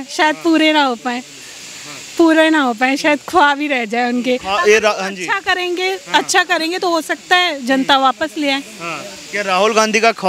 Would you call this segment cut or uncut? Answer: uncut